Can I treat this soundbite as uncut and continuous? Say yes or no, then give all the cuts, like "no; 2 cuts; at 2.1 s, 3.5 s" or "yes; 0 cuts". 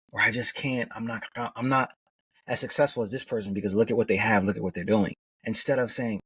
no; 1 cut; at 5.3 s